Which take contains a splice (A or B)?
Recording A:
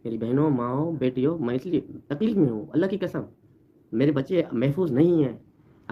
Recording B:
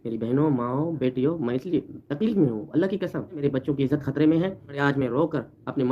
B